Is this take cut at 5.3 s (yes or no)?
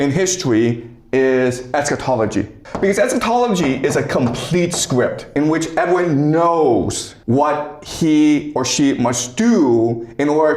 yes